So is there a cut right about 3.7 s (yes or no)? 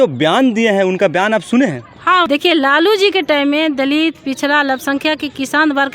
no